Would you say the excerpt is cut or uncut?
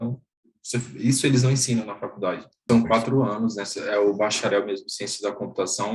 cut